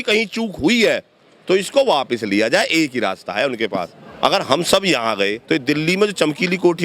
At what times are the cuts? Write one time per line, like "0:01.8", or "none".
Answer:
0:04.0